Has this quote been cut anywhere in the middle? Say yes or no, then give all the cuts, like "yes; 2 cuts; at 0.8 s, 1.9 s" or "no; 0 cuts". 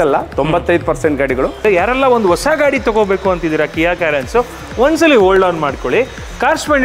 yes; 1 cut; at 1.6 s